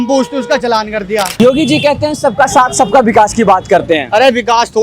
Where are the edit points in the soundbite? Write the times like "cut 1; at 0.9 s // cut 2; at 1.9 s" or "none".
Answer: cut 1; at 1.4 s

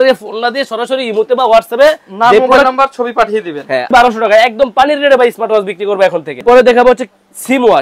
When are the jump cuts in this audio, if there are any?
cut 1; at 3.9 s // cut 2; at 6.4 s

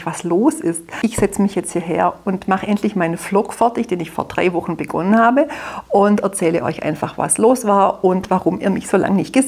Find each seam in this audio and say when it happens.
cut 1; at 0.9 s

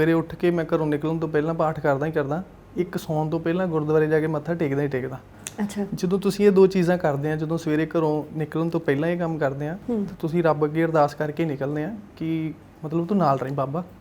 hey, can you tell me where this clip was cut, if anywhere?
none

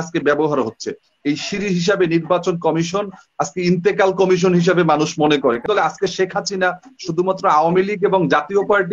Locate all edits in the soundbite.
cut 1; at 5.6 s

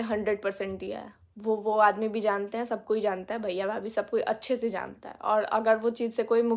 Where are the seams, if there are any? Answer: none

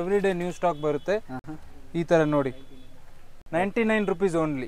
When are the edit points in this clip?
none

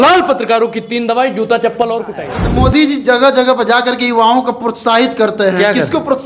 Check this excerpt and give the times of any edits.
cut 1; at 2.2 s

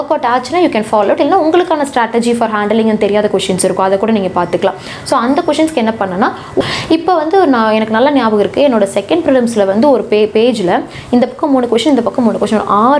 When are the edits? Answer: cut 1; at 6.6 s

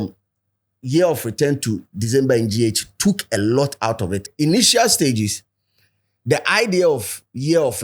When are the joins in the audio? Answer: cut 1; at 4.2 s

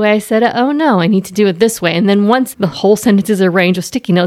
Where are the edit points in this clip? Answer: cut 1; at 2.6 s

